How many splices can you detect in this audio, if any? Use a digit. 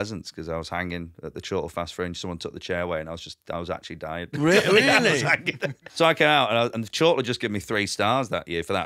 1